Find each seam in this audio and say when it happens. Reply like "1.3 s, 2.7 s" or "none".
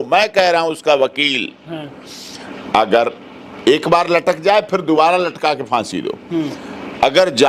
none

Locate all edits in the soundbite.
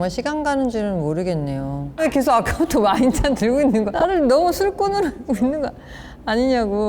2.0 s

